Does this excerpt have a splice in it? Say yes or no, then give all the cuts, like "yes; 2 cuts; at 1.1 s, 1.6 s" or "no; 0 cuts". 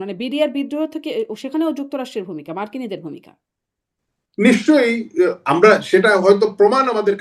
no; 0 cuts